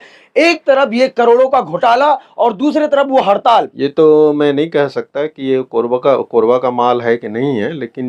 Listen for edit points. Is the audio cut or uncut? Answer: cut